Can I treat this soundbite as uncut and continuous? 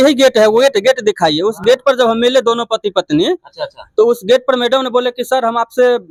yes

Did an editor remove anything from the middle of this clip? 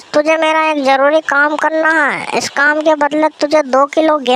no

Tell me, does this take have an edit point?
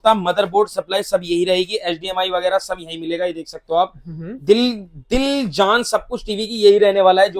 no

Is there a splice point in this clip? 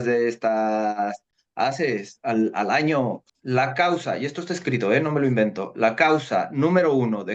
yes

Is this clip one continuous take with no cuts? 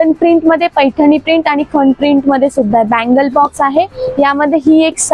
yes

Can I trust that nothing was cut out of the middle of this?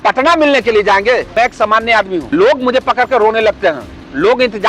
no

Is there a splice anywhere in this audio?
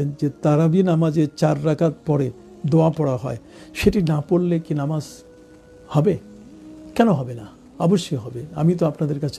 no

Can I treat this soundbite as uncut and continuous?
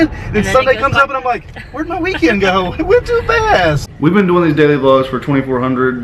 no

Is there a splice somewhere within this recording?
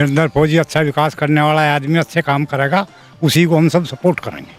no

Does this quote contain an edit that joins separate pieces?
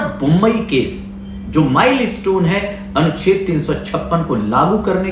no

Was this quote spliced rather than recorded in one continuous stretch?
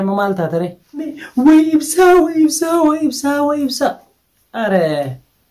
yes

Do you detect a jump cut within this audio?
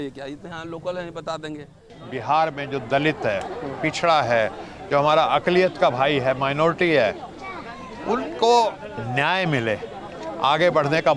yes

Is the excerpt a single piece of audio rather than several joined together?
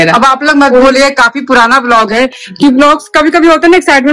yes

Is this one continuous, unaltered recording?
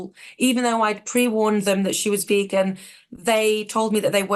yes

